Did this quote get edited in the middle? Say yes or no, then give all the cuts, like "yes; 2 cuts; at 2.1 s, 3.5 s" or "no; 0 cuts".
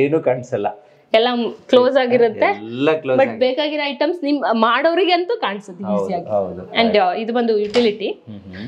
no; 0 cuts